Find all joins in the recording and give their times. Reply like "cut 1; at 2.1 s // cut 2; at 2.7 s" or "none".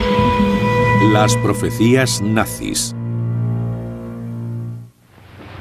none